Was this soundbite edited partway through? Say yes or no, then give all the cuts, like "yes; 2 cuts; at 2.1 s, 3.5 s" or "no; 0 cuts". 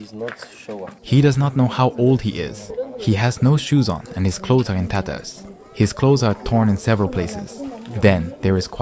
no; 0 cuts